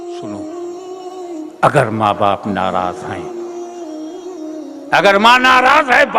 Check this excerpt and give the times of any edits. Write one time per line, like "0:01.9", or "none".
0:01.0